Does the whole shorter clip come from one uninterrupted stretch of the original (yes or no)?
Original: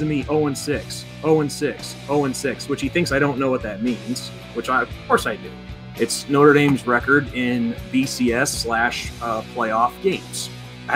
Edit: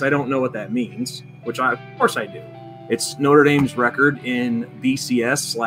yes